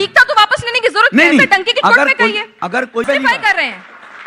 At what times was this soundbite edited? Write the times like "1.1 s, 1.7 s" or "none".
3.0 s